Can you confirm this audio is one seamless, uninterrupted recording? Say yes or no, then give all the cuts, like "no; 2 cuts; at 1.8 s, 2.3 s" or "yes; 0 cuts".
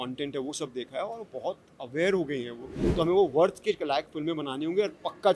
no; 1 cut; at 2.8 s